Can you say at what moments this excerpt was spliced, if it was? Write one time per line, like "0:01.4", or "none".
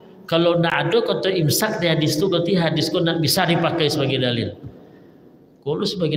none